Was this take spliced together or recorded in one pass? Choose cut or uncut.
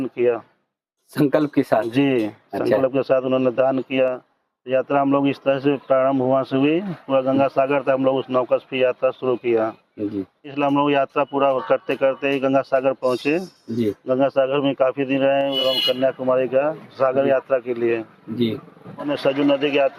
cut